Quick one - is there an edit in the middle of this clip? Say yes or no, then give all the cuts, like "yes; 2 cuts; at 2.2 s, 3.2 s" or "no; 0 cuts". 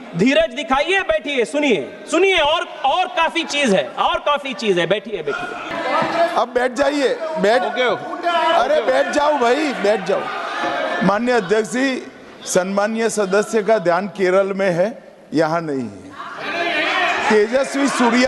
yes; 1 cut; at 5.7 s